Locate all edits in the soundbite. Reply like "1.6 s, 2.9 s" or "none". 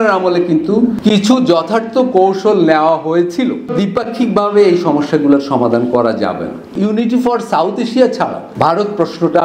1.0 s, 3.7 s, 6.8 s, 8.4 s